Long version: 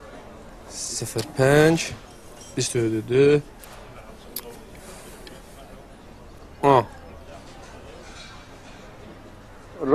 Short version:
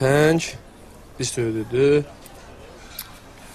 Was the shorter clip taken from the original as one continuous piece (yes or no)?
no